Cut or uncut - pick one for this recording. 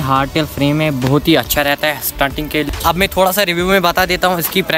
cut